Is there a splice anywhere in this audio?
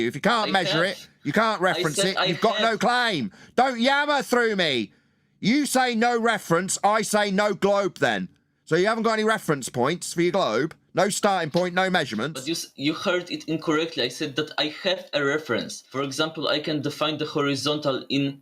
yes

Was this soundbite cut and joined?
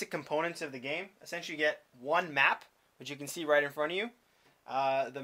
yes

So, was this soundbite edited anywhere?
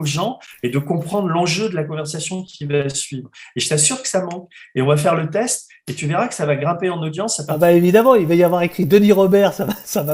no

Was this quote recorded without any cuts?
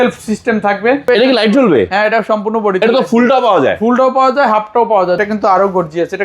no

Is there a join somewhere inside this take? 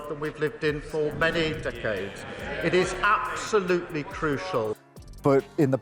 yes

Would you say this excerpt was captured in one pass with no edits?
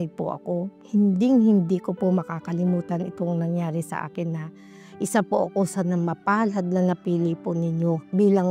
yes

